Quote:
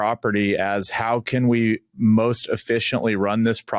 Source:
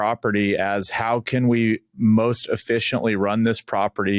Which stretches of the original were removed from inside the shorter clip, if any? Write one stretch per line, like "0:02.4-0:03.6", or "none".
none